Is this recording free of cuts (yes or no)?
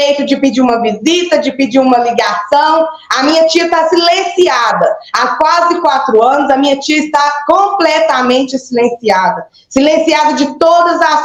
yes